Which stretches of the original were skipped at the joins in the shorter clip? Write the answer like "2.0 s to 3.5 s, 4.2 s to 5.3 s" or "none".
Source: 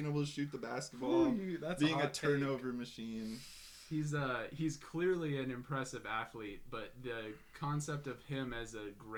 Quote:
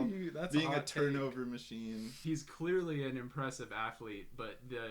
3.5 s to 4.5 s